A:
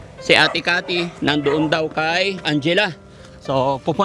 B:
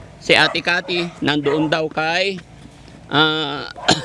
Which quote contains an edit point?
A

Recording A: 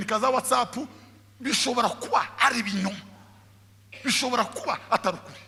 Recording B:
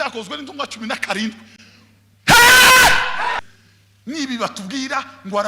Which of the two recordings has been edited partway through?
B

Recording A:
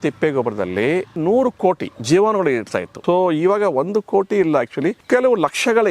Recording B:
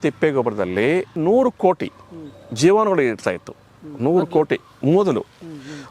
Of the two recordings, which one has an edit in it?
A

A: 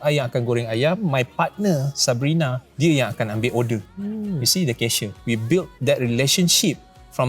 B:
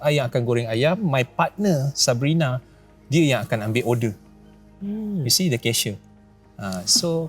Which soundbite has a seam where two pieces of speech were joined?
A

